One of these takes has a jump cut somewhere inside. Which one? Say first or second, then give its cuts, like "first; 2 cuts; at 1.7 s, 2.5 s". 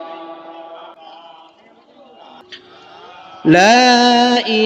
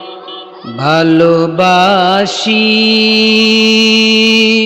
first; 2 cuts; at 0.9 s, 2.4 s